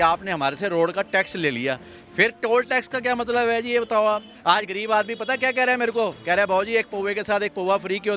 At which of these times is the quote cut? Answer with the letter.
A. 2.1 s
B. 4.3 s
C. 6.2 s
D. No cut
B